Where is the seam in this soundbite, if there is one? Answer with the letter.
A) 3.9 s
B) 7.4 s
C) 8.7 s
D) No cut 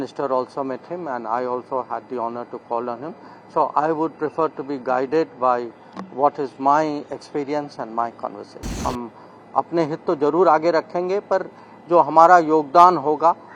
C